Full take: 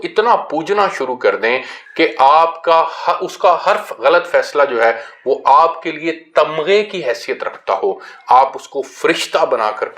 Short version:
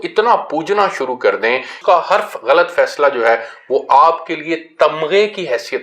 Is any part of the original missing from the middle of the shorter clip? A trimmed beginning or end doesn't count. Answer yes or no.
yes